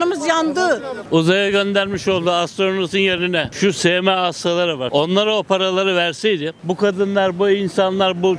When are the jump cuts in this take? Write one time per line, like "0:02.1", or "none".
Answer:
0:00.9
0:03.5
0:04.8